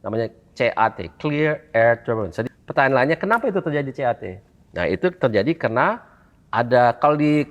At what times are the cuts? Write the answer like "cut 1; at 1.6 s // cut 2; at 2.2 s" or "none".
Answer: cut 1; at 2.4 s

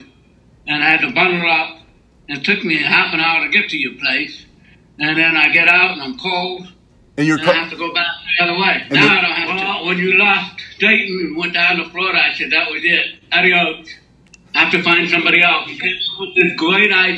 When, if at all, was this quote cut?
cut 1; at 9.3 s // cut 2; at 15.6 s

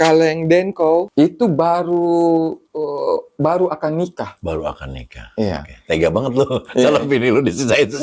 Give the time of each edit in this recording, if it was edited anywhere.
cut 1; at 1.1 s

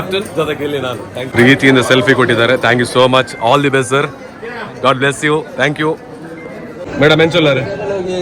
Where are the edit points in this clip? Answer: cut 1; at 1.3 s // cut 2; at 6.8 s

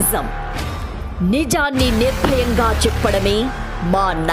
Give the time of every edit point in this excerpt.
none

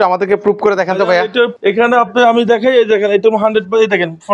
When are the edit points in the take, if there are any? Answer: cut 1; at 1.5 s

